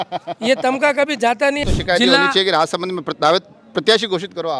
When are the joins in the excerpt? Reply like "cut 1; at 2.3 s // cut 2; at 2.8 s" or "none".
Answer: cut 1; at 1.6 s